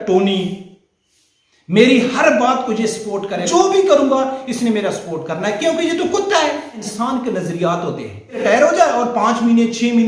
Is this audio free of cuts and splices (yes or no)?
no